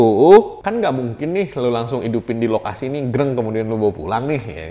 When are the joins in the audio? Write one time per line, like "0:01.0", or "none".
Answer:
none